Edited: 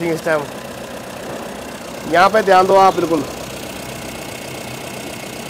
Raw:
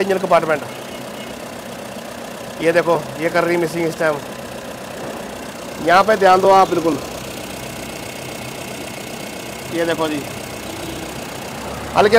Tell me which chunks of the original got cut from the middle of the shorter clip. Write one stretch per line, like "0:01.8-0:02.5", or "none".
none